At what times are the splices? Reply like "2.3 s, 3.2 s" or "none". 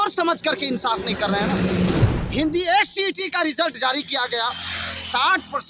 2.0 s